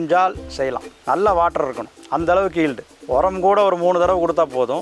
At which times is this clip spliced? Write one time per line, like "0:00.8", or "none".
none

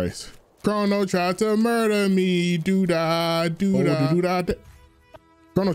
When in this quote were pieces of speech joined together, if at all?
0:03.9

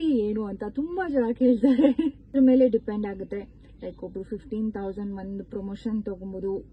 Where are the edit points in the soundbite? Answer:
0:02.3

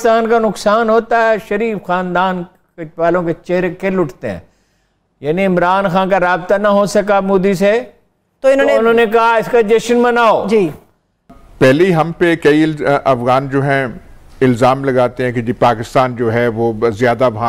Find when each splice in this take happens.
0:11.4

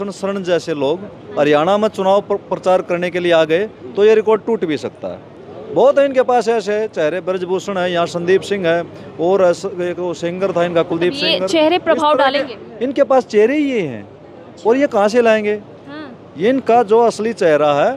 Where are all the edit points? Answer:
none

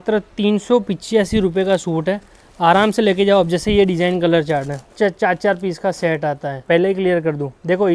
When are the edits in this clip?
0:04.8
0:06.6

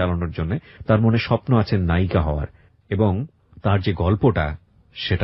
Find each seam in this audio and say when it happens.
none

